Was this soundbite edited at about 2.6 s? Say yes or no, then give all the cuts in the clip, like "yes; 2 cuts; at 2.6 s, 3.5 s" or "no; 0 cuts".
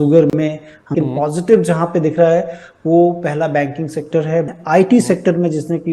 no; 2 cuts; at 0.9 s, 4.5 s